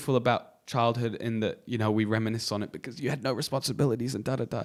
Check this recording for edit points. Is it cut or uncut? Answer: uncut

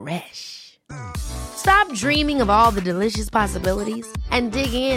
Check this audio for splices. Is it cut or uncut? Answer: uncut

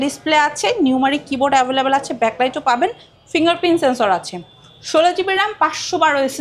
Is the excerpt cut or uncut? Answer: uncut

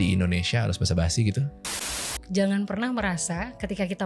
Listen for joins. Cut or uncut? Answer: cut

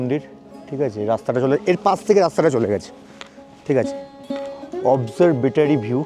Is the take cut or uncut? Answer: uncut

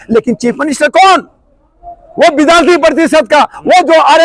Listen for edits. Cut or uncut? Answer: uncut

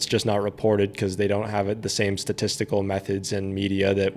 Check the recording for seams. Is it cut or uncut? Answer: uncut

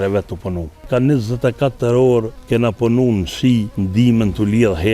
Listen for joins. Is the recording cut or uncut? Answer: cut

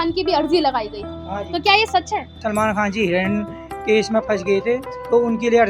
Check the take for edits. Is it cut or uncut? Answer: cut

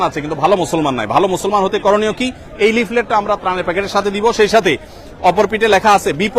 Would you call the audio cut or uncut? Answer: uncut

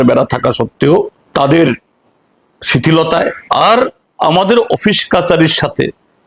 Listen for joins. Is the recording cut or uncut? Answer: cut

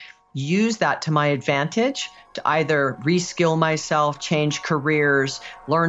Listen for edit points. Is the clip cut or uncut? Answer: uncut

